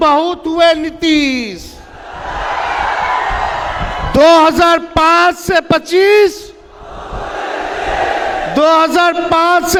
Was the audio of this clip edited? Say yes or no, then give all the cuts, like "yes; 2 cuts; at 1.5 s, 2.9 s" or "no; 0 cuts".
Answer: no; 0 cuts